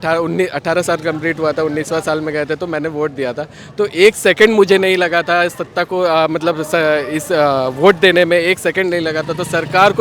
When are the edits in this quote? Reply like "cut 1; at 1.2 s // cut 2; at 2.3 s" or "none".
none